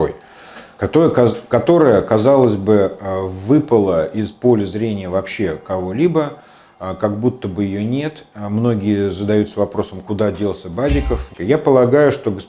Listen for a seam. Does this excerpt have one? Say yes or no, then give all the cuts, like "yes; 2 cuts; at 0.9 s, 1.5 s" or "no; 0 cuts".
yes; 1 cut; at 11.3 s